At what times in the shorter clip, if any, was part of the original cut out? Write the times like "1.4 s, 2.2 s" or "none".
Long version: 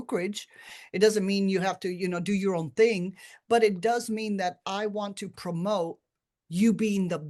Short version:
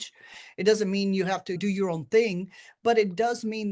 1.6 s